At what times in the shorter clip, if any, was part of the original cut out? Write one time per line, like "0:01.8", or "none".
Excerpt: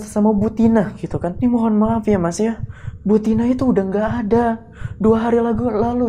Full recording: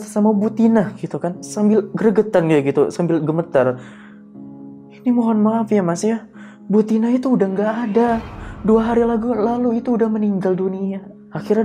0:01.3